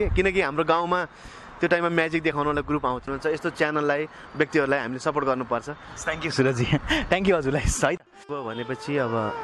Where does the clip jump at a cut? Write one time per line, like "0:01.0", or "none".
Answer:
0:03.1
0:08.4